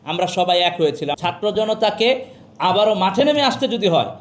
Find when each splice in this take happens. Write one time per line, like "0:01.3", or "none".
0:01.2